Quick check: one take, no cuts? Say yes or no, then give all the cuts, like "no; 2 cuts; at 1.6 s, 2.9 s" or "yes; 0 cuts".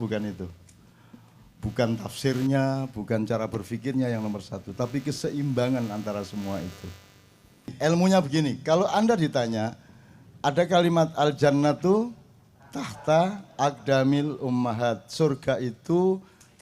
no; 1 cut; at 7.7 s